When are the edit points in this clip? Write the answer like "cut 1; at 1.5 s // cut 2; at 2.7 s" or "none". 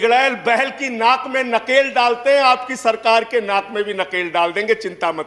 none